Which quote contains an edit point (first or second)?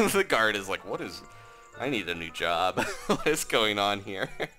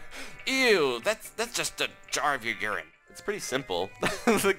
second